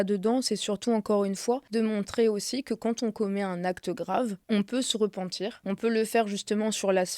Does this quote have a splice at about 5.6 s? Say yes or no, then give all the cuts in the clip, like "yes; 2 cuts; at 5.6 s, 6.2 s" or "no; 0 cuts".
yes; 3 cuts; at 1.6 s, 4.4 s, 5.6 s